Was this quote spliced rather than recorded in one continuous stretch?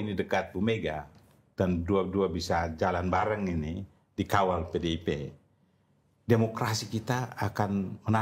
no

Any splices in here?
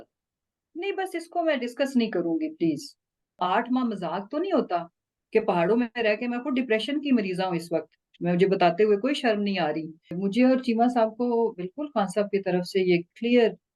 yes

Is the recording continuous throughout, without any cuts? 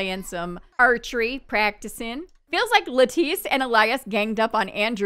no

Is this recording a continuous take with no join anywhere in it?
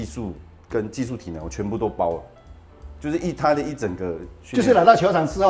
yes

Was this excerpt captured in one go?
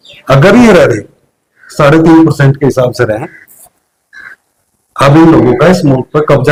yes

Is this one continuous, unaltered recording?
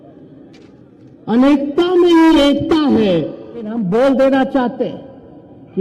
no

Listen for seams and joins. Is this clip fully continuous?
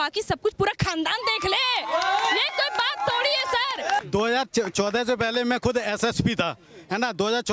no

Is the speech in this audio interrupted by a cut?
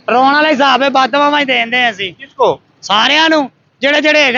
no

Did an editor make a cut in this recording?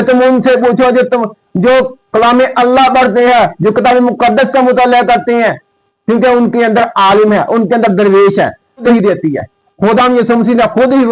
yes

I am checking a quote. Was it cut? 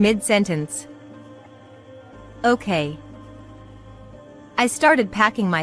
yes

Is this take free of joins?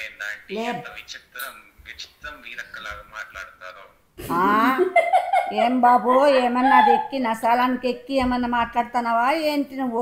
yes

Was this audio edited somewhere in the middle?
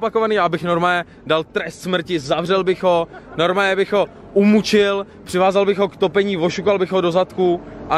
no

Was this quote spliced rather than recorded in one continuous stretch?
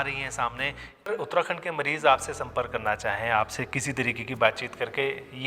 yes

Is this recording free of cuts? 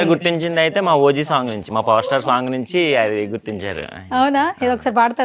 yes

